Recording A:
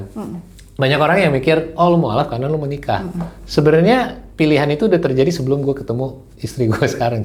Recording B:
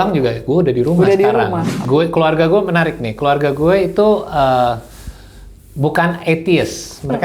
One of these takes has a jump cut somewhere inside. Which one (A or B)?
B